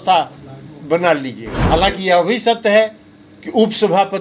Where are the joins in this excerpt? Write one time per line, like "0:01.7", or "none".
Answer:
0:01.6